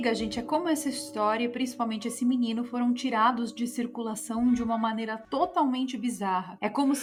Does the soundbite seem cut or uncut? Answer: uncut